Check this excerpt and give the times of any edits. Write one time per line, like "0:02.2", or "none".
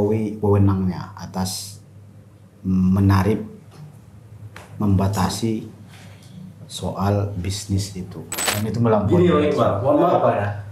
0:08.5